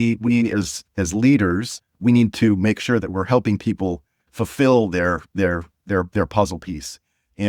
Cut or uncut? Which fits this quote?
uncut